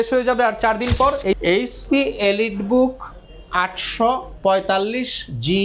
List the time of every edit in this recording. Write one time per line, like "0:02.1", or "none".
0:01.4